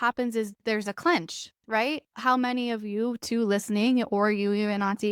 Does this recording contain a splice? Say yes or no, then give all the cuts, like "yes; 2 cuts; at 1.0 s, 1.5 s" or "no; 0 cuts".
no; 0 cuts